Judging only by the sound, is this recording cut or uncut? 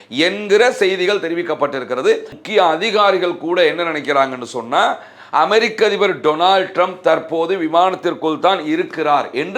cut